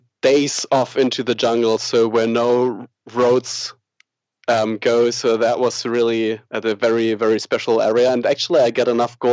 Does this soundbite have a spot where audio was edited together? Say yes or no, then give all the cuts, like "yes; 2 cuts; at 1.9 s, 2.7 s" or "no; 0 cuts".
no; 0 cuts